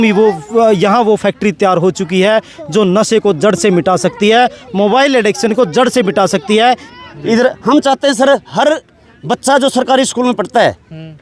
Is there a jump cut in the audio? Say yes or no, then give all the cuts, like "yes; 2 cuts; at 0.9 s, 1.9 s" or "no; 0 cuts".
yes; 1 cut; at 6.9 s